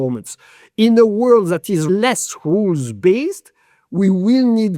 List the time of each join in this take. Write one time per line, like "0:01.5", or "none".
0:01.8